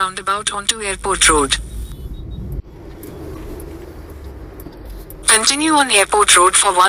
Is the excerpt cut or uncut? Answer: uncut